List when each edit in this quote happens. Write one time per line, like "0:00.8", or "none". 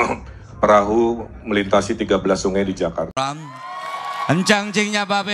0:03.1

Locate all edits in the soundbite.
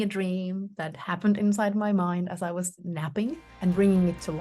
0:03.1

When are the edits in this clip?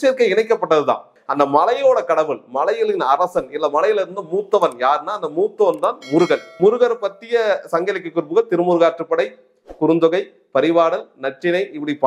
0:01.2
0:06.5

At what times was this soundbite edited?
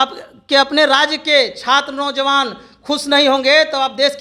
none

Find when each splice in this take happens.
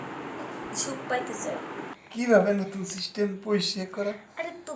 0:01.9

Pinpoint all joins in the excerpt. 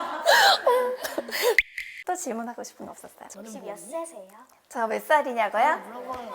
0:01.7

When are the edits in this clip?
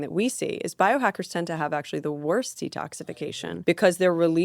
0:03.1

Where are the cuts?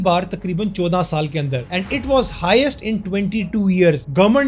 none

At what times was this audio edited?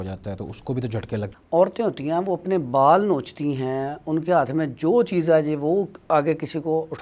0:01.3

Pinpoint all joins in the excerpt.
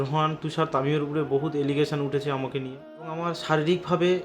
0:03.1

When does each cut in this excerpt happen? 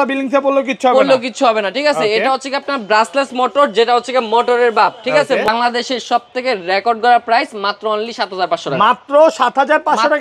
0:05.5

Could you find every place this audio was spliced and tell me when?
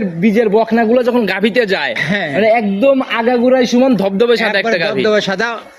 none

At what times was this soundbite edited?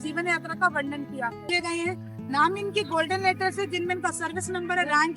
0:01.4

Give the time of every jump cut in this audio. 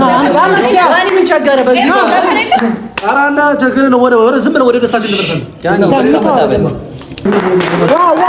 0:07.3

